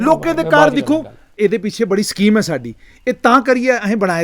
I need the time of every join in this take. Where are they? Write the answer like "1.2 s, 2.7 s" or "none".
1.3 s